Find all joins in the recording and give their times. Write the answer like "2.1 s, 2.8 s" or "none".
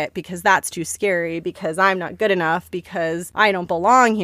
2.9 s